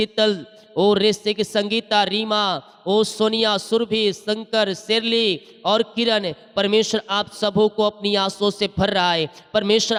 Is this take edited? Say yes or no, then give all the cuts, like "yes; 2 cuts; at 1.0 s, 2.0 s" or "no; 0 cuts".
no; 0 cuts